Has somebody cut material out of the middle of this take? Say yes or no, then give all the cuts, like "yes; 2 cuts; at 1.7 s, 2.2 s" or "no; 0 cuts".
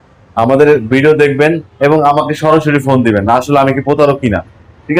no; 0 cuts